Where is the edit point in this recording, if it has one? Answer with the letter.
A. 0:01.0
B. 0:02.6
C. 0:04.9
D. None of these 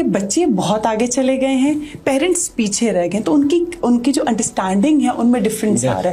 D